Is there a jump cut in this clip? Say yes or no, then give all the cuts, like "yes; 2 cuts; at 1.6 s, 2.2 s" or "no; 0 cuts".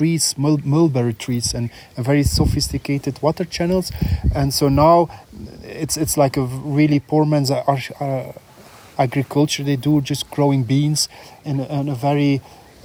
no; 0 cuts